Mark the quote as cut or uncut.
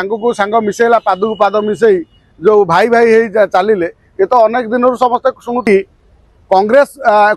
cut